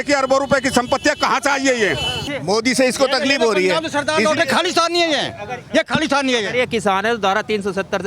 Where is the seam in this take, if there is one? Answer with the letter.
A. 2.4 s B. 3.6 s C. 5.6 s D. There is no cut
A